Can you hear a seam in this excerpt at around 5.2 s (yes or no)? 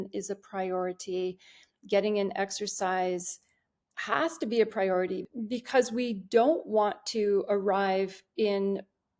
yes